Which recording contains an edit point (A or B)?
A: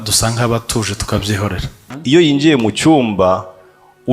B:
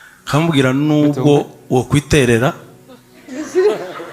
A